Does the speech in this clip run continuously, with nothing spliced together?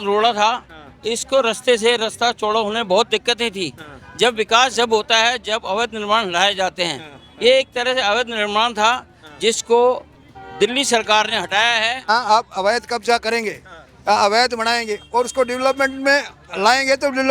no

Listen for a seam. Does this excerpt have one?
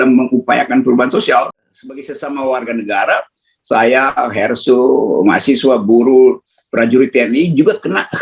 yes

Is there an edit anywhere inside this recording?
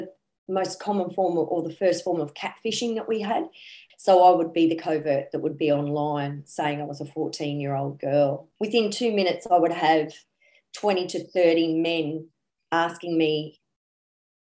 yes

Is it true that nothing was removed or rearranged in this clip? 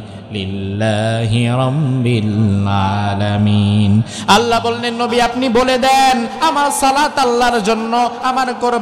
yes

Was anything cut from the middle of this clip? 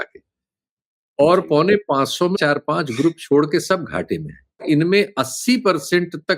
yes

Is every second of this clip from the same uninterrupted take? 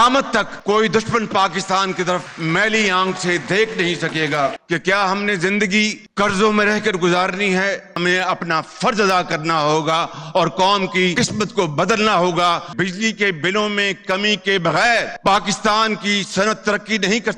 no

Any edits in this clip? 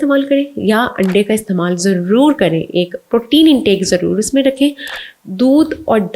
no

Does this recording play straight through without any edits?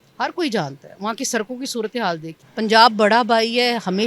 no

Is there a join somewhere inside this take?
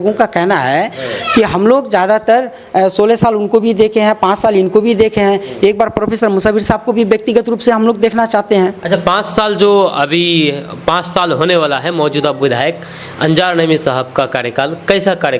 no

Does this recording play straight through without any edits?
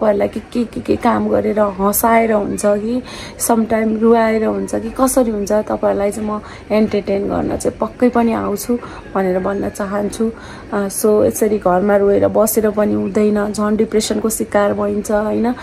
yes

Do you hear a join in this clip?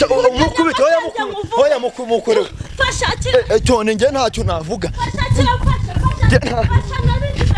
no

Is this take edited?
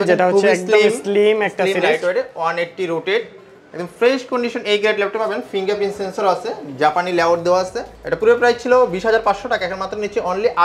yes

